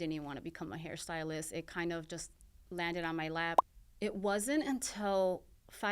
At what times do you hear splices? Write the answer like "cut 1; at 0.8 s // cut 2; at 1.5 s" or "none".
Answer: cut 1; at 3.7 s